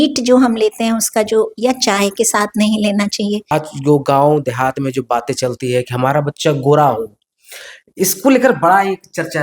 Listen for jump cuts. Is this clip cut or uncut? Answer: cut